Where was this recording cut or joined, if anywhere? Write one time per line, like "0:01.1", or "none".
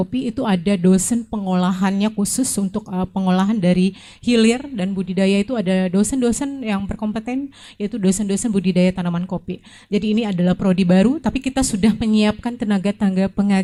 none